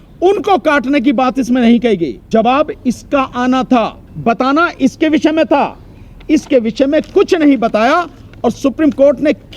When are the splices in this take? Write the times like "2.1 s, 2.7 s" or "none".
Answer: 2.3 s, 4.0 s